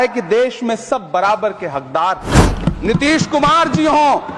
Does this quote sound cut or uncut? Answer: cut